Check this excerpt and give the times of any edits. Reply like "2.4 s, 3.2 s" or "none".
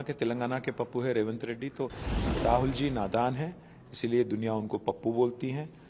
2.0 s